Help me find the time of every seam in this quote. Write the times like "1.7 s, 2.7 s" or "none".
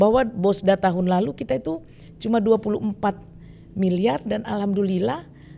none